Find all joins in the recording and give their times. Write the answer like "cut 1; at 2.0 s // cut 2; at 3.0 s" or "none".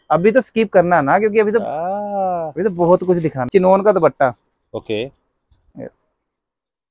cut 1; at 3.4 s